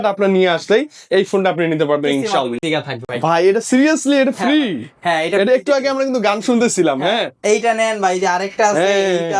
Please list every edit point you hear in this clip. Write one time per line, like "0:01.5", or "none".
none

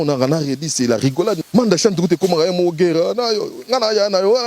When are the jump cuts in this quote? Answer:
0:01.4

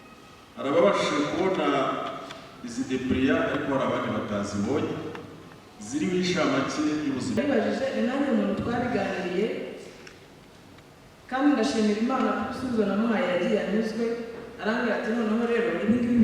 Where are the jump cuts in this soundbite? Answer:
0:07.4

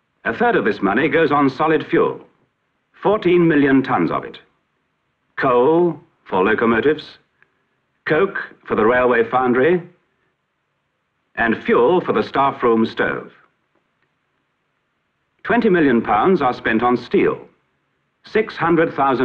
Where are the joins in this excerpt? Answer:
none

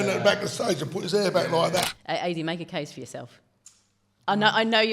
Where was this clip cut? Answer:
0:01.9

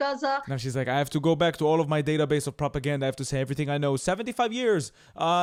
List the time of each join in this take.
none

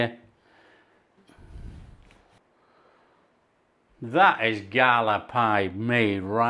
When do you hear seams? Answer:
0:01.2
0:02.4

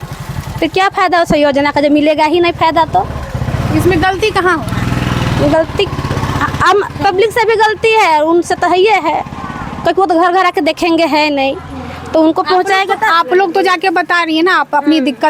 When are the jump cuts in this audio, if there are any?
none

